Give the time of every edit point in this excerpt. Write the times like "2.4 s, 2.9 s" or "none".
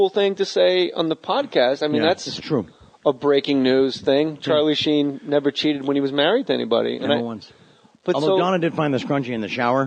4.5 s